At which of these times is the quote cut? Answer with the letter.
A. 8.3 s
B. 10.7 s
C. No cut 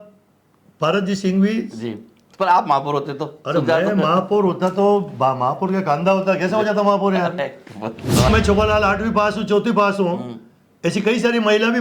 A